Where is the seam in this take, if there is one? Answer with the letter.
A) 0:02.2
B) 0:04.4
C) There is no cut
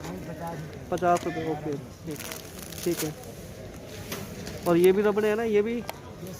A